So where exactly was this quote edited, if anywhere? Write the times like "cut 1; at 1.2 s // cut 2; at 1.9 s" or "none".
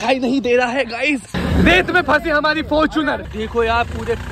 cut 1; at 1.3 s // cut 2; at 3.2 s